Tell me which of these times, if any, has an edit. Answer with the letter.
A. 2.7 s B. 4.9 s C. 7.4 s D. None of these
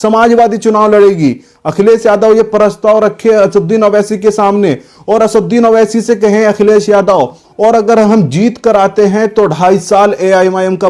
C